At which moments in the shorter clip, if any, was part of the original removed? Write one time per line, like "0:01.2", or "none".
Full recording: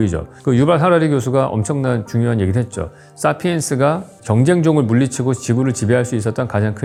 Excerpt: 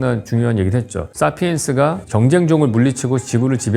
0:01.0
0:02.0